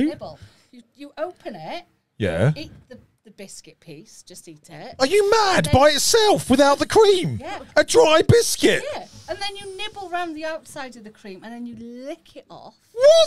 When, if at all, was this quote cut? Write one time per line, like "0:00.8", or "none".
none